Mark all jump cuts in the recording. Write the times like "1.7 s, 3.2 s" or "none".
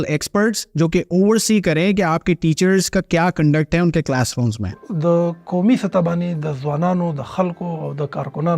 4.8 s